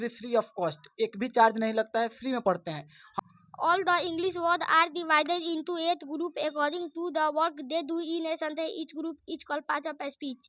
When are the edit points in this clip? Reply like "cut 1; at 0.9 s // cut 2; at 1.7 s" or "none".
cut 1; at 3.0 s